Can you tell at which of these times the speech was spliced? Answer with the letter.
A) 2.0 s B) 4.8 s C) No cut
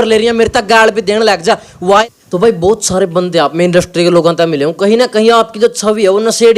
A